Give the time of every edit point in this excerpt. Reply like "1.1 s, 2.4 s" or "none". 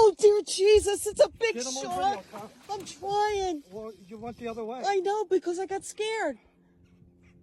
2.0 s